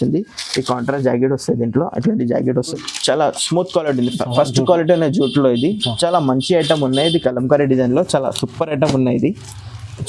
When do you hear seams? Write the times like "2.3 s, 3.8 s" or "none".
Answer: 2.8 s